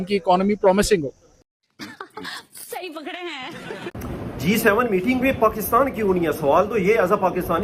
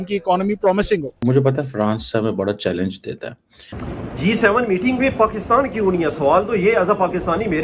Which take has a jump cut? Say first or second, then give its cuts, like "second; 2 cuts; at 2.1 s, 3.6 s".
second; 2 cuts; at 1.1 s, 3.7 s